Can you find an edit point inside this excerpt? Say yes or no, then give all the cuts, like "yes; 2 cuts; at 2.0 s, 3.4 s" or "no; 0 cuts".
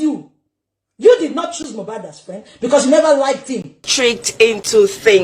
yes; 1 cut; at 3.9 s